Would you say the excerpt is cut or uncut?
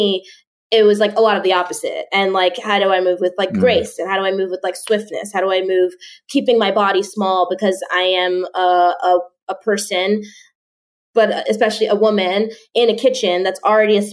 uncut